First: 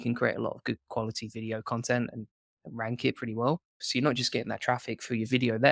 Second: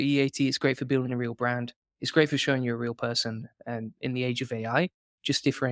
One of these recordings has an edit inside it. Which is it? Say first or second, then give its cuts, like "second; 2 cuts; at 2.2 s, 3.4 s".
first; 1 cut; at 3.8 s